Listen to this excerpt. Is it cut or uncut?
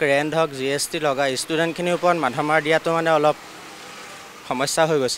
uncut